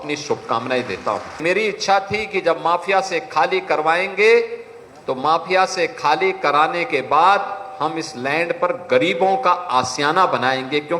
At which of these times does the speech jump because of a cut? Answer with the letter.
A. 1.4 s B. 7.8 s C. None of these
A